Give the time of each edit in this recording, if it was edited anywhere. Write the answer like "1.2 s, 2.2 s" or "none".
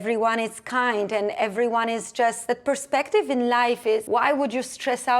2.4 s, 4.0 s